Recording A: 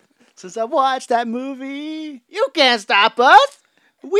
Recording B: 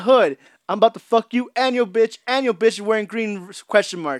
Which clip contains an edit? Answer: A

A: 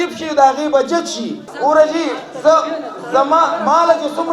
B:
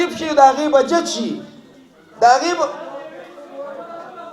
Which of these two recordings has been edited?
A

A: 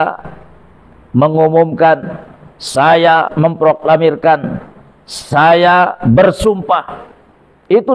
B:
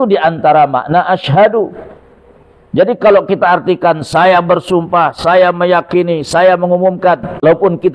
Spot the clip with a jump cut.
A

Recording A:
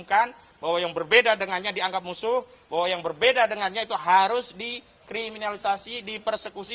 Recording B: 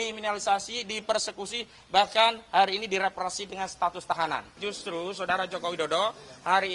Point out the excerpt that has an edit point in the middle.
B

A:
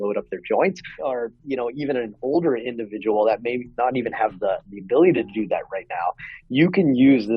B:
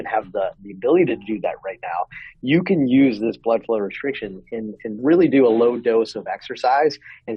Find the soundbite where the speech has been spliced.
A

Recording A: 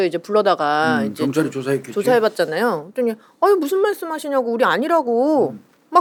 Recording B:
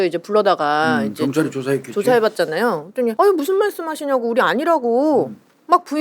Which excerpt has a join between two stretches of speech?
B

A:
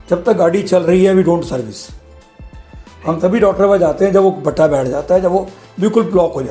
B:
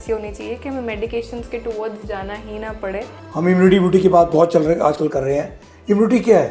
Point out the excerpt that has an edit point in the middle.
B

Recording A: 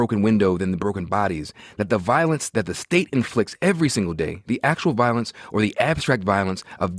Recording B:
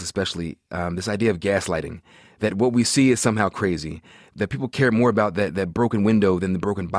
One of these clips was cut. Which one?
B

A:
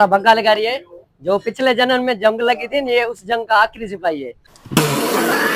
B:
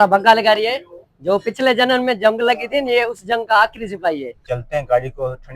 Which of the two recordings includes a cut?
B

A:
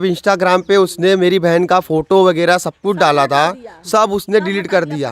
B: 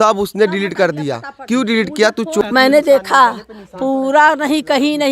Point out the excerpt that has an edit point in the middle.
B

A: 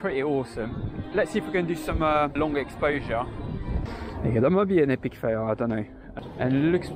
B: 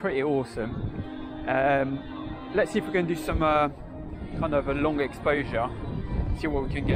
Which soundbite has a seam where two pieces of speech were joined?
A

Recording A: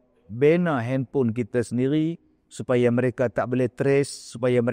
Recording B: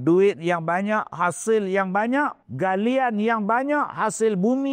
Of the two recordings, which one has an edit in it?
B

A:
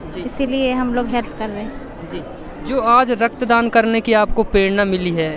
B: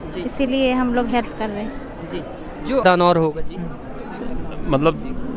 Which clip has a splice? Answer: B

